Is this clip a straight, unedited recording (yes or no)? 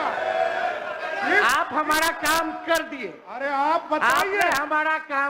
yes